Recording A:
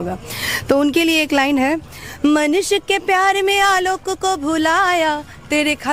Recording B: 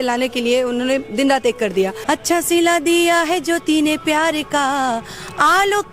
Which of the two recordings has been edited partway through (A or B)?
B